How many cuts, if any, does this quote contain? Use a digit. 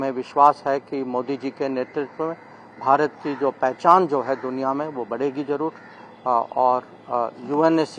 0